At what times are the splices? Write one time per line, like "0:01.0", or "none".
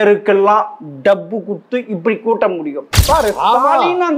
0:02.9